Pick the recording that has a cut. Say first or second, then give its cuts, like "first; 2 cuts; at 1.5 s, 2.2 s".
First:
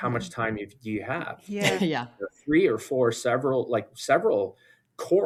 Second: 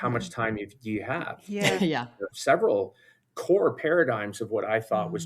second; 1 cut; at 2.3 s